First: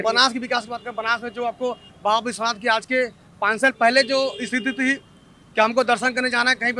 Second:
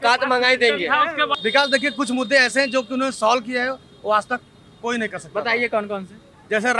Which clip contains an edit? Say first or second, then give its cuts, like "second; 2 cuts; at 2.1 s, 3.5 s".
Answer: second; 1 cut; at 1.3 s